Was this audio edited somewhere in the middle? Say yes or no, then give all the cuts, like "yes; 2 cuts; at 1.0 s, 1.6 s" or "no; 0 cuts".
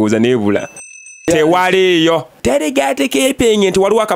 yes; 2 cuts; at 1.0 s, 2.4 s